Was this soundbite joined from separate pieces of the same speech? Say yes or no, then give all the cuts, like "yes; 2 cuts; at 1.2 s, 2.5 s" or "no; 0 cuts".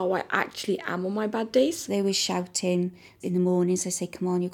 yes; 2 cuts; at 1.8 s, 3.1 s